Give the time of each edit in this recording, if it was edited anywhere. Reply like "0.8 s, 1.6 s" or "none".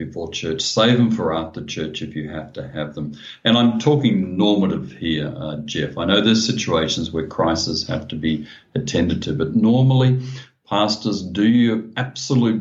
none